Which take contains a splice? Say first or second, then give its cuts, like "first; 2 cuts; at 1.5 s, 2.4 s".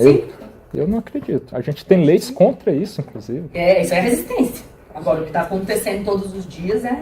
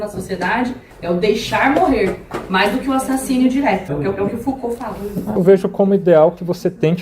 second; 3 cuts; at 0.9 s, 3.9 s, 5.4 s